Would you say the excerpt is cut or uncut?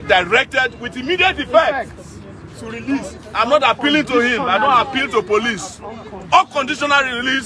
uncut